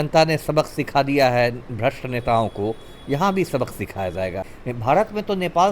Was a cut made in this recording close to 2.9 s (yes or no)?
no